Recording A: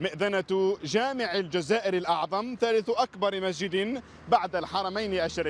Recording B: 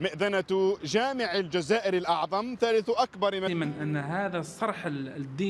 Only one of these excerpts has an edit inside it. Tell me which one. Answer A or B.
A